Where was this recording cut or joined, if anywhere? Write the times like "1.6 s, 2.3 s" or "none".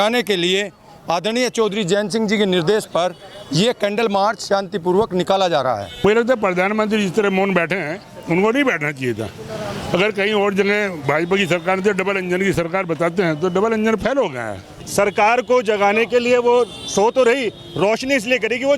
6.0 s, 14.8 s